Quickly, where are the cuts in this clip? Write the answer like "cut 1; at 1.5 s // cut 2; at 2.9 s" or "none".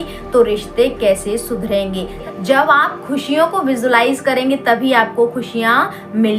cut 1; at 2.2 s